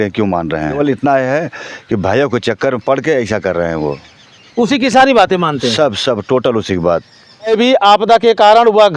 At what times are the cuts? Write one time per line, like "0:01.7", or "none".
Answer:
0:00.8
0:07.5